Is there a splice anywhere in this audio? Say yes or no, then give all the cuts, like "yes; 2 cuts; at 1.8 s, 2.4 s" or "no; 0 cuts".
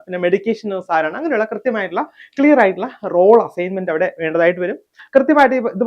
yes; 1 cut; at 5.0 s